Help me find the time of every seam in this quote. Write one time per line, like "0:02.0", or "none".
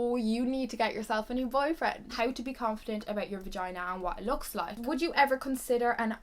0:02.1
0:04.8